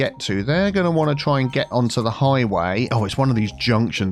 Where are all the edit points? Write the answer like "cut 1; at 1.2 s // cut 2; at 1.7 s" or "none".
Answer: cut 1; at 1.7 s // cut 2; at 2.9 s

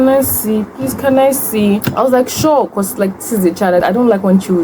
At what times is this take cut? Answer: cut 1; at 1.9 s // cut 2; at 3.8 s

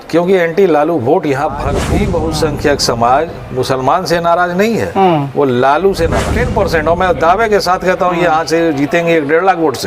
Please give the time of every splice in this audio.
cut 1; at 1.8 s // cut 2; at 6.3 s

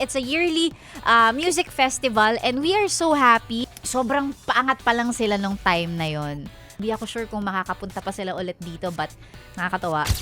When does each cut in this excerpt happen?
cut 1; at 3.9 s // cut 2; at 6.8 s

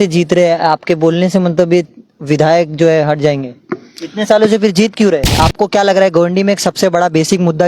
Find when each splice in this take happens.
cut 1; at 5.3 s

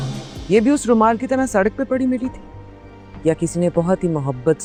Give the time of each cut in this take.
none

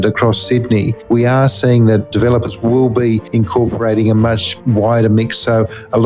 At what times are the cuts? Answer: cut 1; at 2.1 s // cut 2; at 3.3 s // cut 3; at 4.5 s

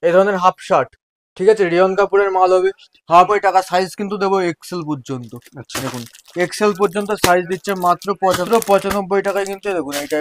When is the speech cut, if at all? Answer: cut 1; at 3.1 s // cut 2; at 8.4 s

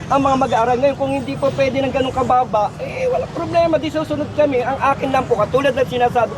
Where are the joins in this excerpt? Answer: none

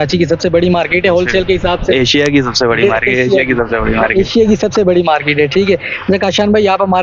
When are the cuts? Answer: none

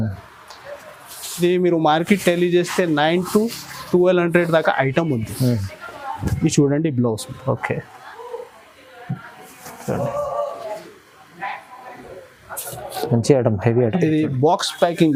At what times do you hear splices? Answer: none

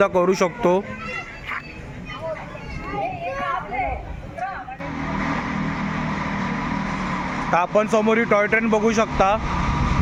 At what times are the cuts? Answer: none

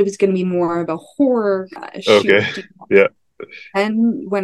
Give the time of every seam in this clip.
cut 1; at 1.8 s

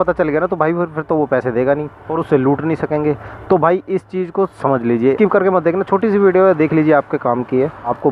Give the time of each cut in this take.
cut 1; at 5.2 s

